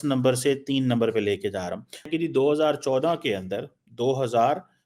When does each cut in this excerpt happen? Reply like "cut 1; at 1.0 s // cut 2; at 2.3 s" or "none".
cut 1; at 2.1 s